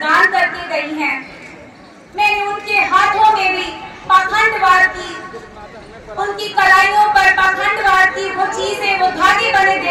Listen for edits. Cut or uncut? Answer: uncut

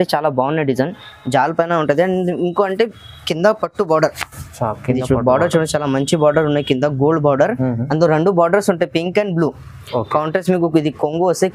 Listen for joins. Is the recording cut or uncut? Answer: uncut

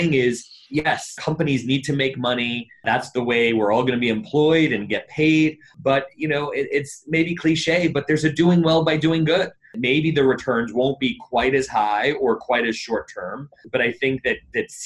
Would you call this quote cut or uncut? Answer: cut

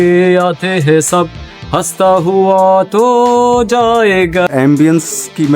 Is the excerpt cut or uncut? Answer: cut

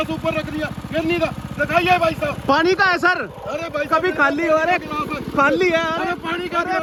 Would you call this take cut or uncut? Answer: uncut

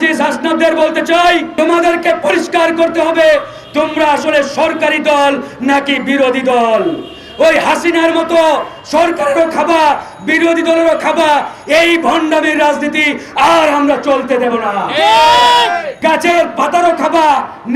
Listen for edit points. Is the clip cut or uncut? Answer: cut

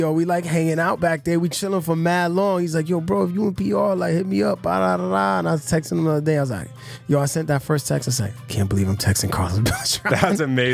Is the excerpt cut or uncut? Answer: uncut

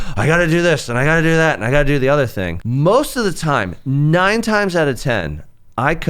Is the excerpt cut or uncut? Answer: cut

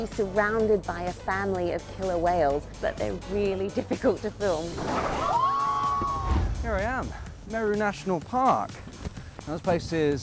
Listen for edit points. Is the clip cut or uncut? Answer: cut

